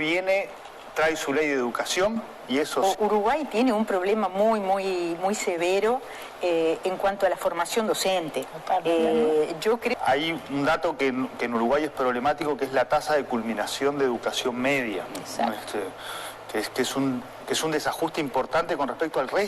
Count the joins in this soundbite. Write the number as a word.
two